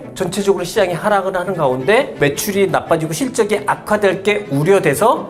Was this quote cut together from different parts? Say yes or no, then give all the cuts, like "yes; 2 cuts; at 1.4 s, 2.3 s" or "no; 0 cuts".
no; 0 cuts